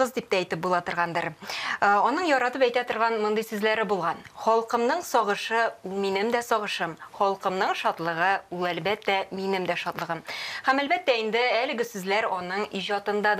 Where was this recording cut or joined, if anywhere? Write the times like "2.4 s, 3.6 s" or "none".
none